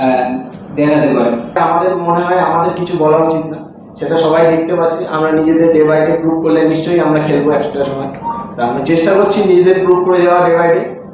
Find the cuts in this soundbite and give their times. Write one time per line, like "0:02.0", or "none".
0:01.6